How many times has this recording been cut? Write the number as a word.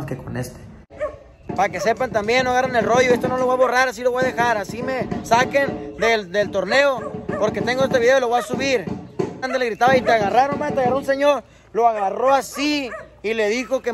two